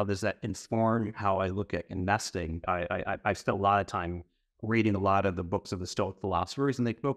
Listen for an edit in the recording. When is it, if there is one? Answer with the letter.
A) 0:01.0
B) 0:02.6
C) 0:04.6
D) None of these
B